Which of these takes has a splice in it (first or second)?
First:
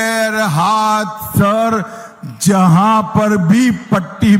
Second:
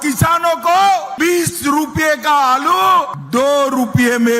second